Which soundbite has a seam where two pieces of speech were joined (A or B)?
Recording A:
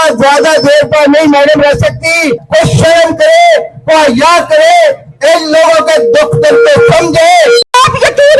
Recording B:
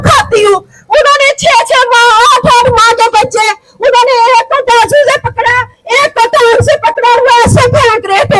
A